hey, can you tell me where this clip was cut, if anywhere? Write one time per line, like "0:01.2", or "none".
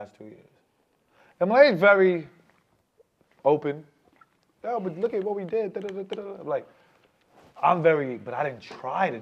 none